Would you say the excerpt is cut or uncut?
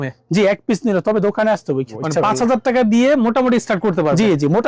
cut